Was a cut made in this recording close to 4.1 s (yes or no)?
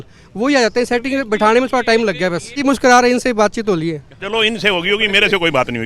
no